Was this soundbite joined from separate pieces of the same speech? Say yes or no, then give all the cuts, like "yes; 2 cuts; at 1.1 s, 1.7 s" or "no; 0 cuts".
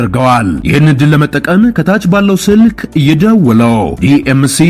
no; 0 cuts